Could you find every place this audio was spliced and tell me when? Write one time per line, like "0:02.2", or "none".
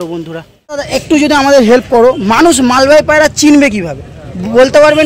0:01.0